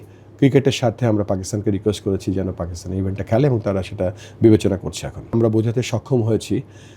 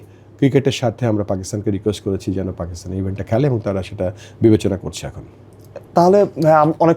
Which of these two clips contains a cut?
first; 1 cut; at 5.3 s

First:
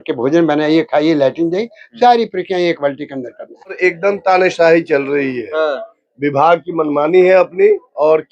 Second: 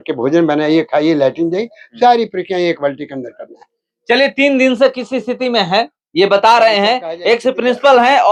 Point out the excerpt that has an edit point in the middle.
first; 1 cut; at 3.8 s

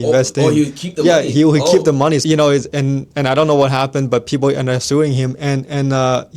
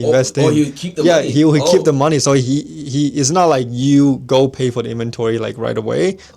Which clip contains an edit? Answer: first; 1 cut; at 2.2 s

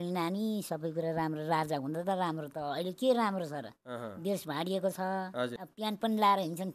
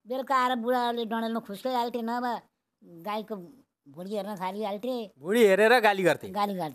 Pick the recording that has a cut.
first; 1 cut; at 5.6 s

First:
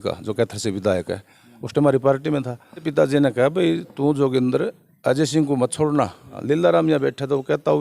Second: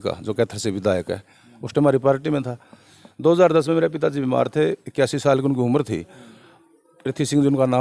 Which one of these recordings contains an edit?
first; 2 cuts; at 2.9 s, 6.3 s

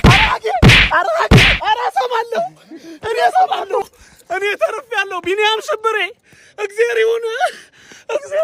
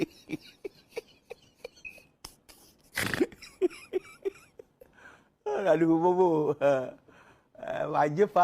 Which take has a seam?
second; 1 cut; at 6.2 s

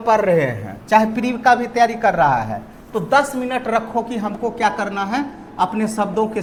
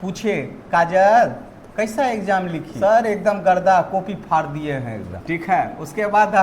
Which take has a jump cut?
second; 2 cuts; at 2.6 s, 5.1 s

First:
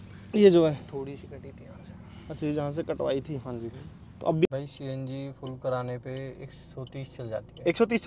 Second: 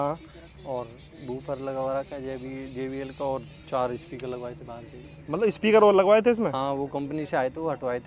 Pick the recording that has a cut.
first; 1 cut; at 4.5 s

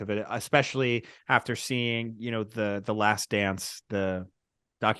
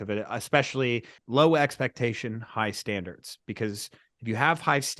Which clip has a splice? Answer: second; 1 cut; at 1.2 s

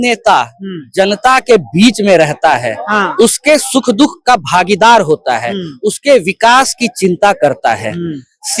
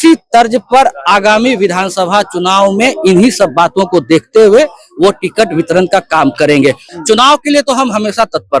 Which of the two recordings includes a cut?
second; 1 cut; at 6.9 s

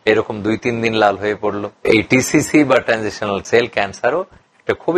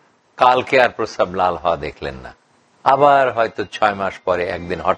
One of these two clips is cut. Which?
first; 2 cuts; at 1.8 s, 3.4 s

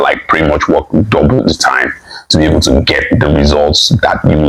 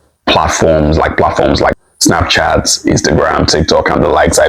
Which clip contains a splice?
second; 1 cut; at 1.9 s

